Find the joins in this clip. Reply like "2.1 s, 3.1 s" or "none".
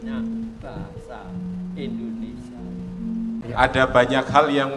3.4 s